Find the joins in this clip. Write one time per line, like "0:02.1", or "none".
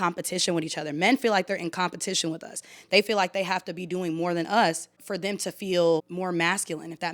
0:05.0
0:06.1